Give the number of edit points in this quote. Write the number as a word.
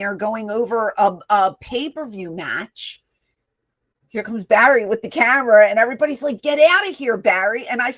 zero